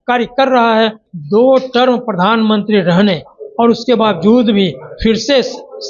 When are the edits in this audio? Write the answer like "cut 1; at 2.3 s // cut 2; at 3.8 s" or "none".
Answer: cut 1; at 1.1 s